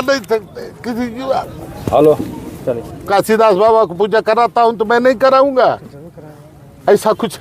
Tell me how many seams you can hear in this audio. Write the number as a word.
one